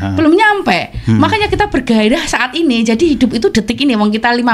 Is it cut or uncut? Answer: uncut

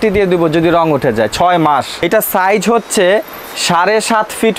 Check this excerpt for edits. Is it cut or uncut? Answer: cut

